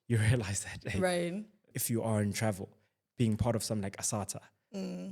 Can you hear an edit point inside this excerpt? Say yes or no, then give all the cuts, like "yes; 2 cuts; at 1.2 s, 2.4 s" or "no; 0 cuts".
yes; 1 cut; at 1.7 s